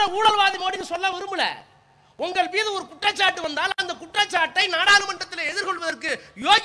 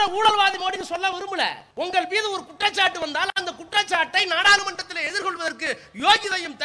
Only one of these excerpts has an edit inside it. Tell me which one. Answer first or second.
second